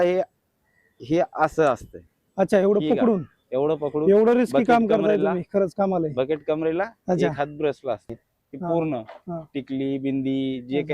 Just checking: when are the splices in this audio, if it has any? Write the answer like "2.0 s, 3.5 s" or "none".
8.2 s